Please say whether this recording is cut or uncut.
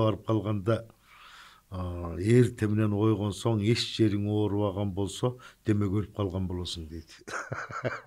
uncut